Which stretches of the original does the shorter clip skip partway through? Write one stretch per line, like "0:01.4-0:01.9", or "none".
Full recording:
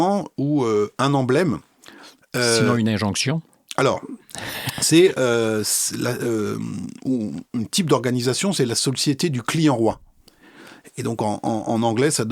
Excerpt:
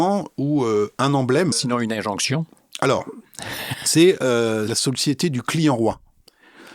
0:01.7-0:02.7
0:05.7-0:08.8